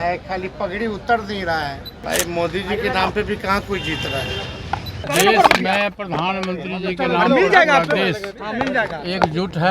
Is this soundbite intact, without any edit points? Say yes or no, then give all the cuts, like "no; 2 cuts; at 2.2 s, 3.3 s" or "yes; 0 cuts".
no; 2 cuts; at 1.9 s, 5.1 s